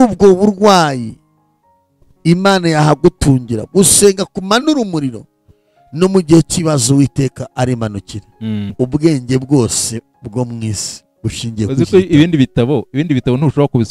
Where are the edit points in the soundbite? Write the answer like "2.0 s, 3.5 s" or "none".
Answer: 8.7 s